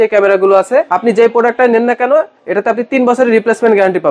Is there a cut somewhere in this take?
yes; 1 cut; at 0.9 s

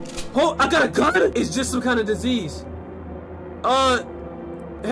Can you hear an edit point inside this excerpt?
no; 0 cuts

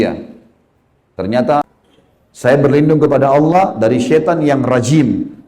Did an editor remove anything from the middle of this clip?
yes; 1 cut; at 1.6 s

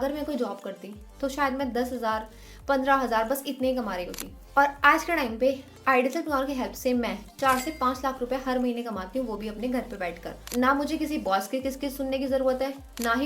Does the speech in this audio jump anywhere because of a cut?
no; 0 cuts

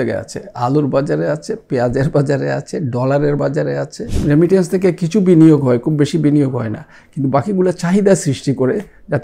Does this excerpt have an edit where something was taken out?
yes; 1 cut; at 4.2 s

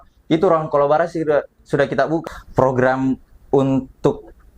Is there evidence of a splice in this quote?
yes; 1 cut; at 2.2 s

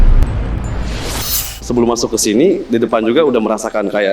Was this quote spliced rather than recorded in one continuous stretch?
yes; 1 cut; at 1.6 s

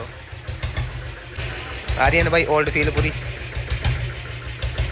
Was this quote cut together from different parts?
yes; 1 cut; at 1.4 s

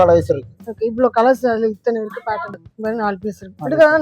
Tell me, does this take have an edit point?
yes; 1 cut; at 2.6 s

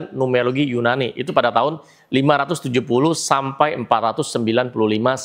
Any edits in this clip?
no; 0 cuts

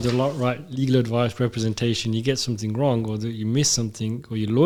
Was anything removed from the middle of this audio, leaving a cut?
no; 0 cuts

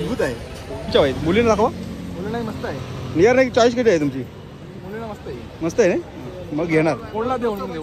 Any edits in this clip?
yes; 1 cut; at 0.9 s

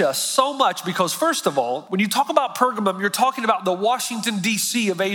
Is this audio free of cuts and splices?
no; 1 cut; at 1.8 s

